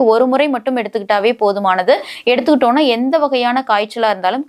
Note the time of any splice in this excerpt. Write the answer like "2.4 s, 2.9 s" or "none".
none